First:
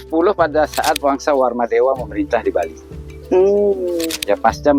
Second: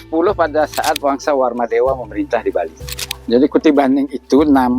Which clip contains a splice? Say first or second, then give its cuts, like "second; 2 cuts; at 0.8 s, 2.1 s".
second; 1 cut; at 3.1 s